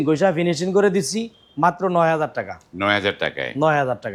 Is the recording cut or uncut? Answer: uncut